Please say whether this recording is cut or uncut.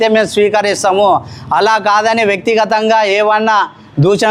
uncut